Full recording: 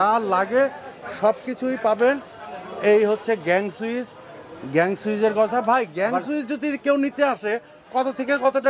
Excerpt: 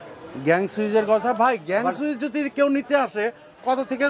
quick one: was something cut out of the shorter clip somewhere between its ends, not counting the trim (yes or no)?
no